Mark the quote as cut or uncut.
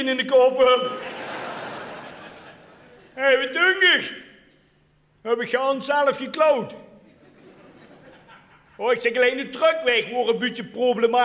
cut